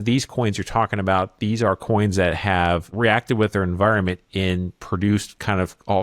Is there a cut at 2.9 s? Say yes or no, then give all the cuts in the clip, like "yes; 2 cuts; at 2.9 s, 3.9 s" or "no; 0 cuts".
yes; 1 cut; at 2.9 s